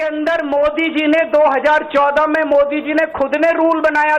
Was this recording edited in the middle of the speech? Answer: no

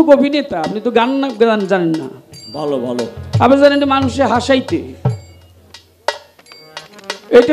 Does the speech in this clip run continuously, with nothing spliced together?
yes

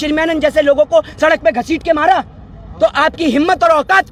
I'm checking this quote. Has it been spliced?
no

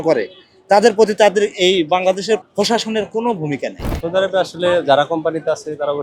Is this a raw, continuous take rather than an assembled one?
no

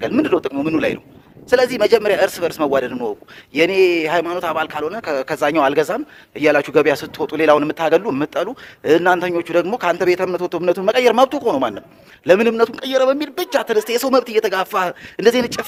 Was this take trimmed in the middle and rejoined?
no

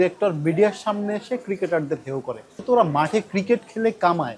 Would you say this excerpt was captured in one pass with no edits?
no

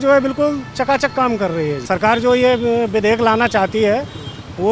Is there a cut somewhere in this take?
yes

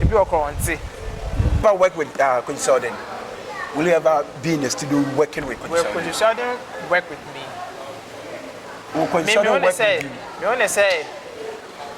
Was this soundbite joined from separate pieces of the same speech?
yes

